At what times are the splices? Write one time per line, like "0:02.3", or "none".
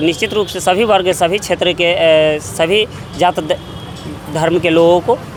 none